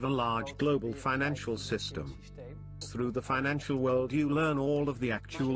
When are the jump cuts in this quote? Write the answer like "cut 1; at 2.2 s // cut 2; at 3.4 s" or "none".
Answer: none